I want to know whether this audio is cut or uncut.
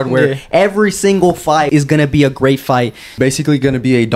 cut